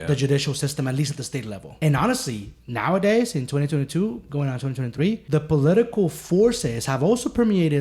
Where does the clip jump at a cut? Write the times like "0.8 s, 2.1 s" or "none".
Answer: 1.6 s, 5.2 s